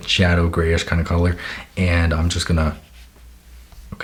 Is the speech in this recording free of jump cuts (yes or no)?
yes